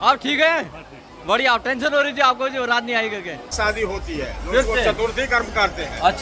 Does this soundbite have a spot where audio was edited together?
yes; 1 cut; at 3.4 s

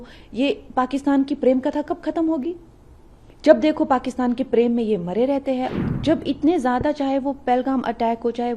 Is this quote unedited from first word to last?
no; 1 cut; at 5.7 s

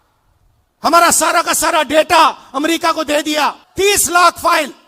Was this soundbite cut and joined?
yes; 1 cut; at 3.6 s

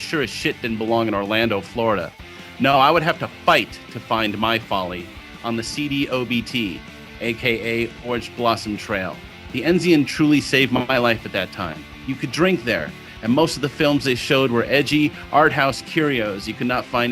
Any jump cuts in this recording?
yes; 1 cut; at 14.9 s

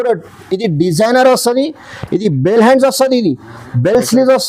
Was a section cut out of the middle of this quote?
no; 0 cuts

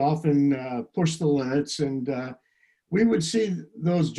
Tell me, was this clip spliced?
no; 0 cuts

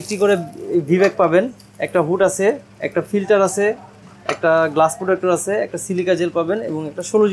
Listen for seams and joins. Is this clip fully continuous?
yes; 0 cuts

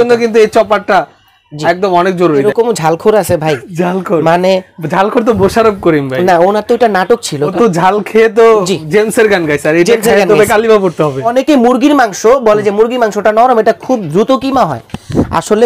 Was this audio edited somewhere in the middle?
yes; 3 cuts; at 2.4 s, 7.5 s, 11.3 s

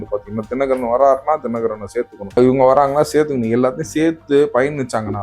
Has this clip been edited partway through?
yes; 1 cut; at 2.4 s

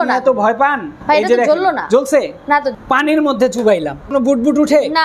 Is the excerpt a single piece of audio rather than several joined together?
no; 3 cuts; at 0.9 s, 2.7 s, 4.1 s

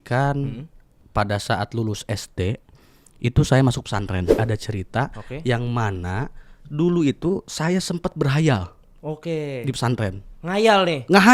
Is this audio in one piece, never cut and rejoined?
no; 1 cut; at 4.4 s

